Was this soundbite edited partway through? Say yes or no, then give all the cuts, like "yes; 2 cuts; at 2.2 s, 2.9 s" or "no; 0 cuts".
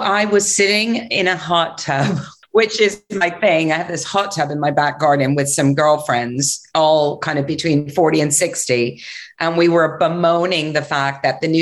yes; 1 cut; at 2.3 s